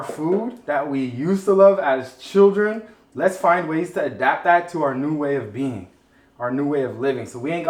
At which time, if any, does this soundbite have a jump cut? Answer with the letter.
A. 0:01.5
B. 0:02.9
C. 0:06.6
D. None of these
D